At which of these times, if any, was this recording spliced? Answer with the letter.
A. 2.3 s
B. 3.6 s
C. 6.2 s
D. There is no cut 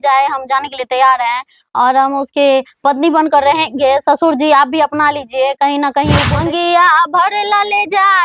C